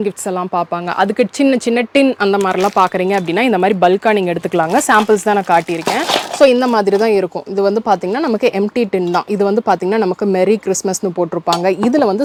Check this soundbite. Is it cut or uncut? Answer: uncut